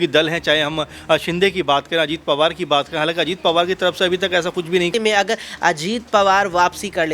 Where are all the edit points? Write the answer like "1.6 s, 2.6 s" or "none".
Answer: 4.9 s